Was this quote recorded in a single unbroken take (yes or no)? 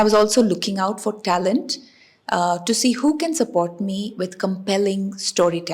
yes